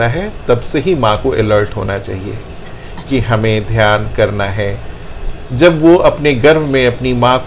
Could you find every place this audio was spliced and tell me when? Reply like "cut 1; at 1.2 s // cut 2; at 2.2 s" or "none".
none